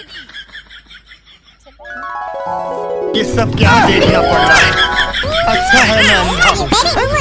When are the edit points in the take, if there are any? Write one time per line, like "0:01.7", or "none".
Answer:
none